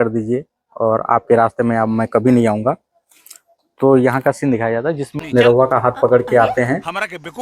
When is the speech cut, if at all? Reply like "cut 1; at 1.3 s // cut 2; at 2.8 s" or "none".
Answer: cut 1; at 5.2 s